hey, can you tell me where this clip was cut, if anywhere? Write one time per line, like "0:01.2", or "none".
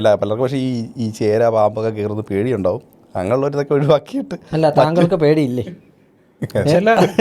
none